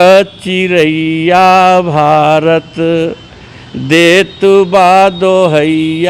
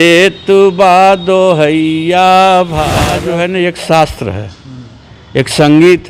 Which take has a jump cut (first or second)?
second